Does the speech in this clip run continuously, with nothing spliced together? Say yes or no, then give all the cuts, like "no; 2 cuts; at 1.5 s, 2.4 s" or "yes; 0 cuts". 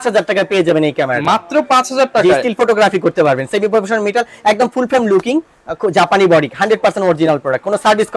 yes; 0 cuts